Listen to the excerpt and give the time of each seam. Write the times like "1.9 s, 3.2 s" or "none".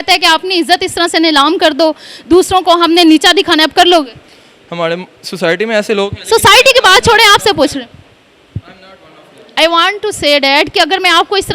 none

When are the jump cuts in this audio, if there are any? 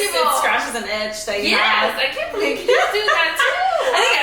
none

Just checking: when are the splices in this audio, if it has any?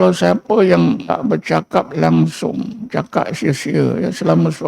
1.0 s

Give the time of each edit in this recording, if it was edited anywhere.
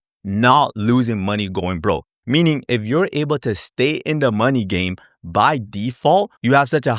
none

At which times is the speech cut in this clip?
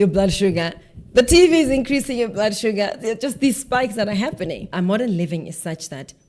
4.7 s

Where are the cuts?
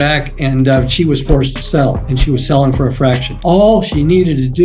none

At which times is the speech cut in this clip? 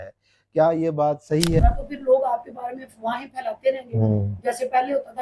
1.6 s

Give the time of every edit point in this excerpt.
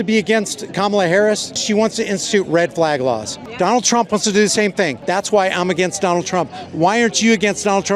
1.5 s, 3.4 s, 5.0 s

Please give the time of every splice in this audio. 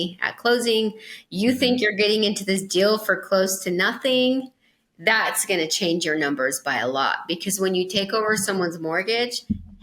none

